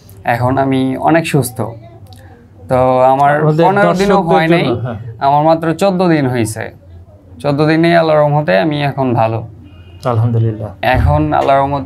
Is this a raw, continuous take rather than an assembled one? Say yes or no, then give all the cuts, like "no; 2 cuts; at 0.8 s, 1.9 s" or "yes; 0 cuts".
no; 1 cut; at 10.8 s